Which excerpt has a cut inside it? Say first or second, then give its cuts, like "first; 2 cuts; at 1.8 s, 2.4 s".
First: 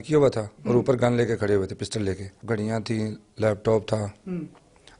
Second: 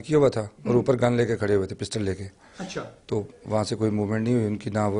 first; 1 cut; at 2.3 s